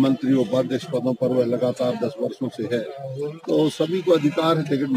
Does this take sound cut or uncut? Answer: uncut